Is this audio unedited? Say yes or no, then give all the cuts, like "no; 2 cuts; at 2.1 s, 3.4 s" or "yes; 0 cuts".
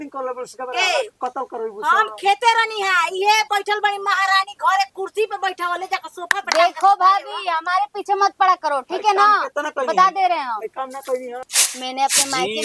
no; 1 cut; at 11.5 s